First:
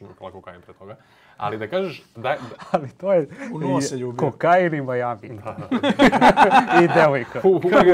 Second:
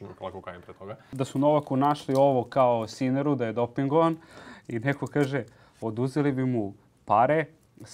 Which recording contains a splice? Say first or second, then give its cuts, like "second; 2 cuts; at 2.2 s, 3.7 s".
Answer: second; 1 cut; at 1.0 s